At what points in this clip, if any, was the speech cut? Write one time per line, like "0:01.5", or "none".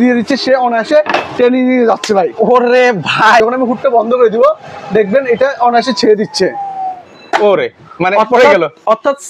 0:03.4